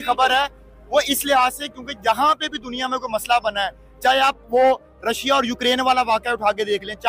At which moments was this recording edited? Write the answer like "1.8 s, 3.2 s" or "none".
none